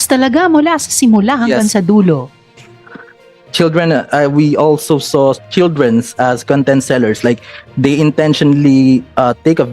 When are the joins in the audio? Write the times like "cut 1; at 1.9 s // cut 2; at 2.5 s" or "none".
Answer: cut 1; at 3.4 s